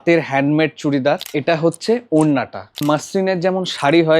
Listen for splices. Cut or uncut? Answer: cut